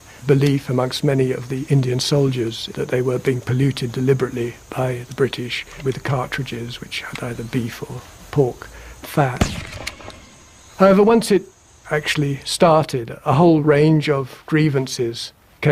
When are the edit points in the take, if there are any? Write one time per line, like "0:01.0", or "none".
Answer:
0:09.6